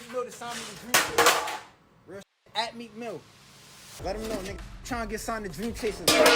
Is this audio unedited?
yes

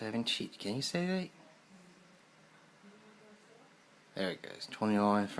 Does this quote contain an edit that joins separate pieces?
no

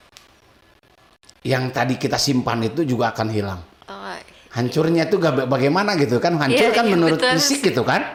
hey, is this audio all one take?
yes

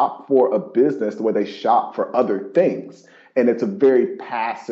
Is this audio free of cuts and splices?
yes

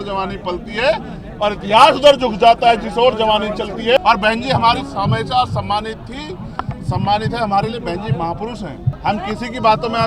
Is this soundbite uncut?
no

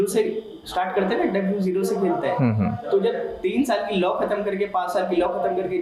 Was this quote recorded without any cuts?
yes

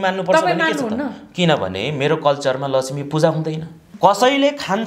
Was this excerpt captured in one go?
no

